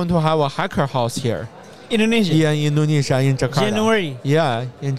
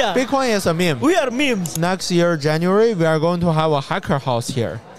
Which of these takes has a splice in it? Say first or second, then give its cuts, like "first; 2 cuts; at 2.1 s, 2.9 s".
second; 1 cut; at 1.7 s